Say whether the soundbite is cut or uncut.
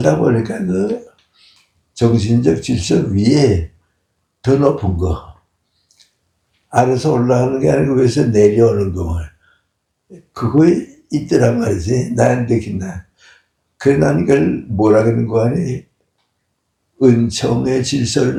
uncut